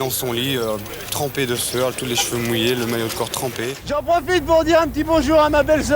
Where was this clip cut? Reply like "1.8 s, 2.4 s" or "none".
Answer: 3.8 s